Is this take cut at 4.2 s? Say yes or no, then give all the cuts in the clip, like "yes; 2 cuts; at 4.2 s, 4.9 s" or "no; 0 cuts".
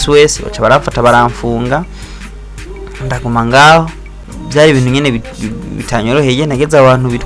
yes; 1 cut; at 4.2 s